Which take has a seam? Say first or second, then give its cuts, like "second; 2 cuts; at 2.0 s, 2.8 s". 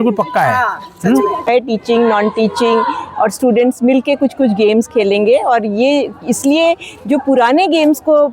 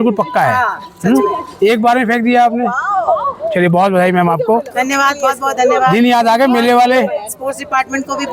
first; 1 cut; at 1.4 s